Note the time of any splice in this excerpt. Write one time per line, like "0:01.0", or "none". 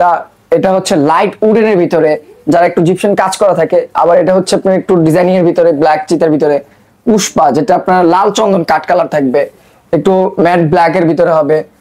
none